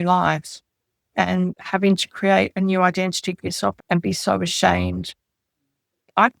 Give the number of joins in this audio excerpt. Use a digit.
1